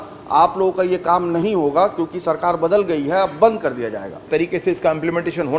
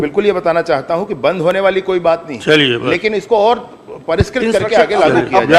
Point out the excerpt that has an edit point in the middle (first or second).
first